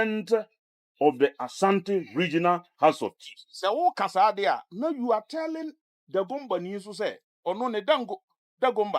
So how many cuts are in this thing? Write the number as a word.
one